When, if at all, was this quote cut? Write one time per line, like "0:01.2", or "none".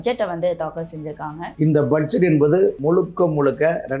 0:01.4
0:02.8